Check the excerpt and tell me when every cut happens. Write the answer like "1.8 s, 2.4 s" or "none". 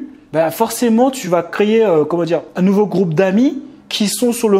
1.2 s, 2.5 s

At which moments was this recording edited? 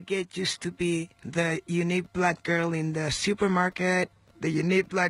1.2 s

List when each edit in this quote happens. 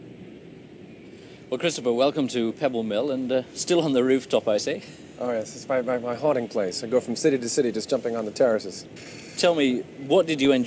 3.5 s

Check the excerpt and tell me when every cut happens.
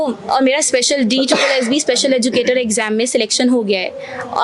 none

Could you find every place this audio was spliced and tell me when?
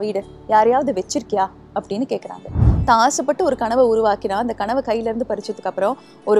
2.6 s

